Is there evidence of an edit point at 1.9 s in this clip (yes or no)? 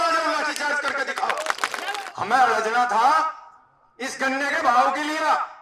yes